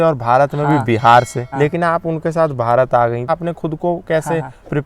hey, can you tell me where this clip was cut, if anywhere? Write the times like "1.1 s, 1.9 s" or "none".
1.4 s, 3.3 s